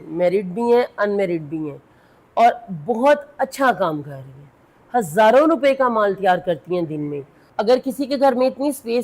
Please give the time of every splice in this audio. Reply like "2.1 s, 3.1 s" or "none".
7.4 s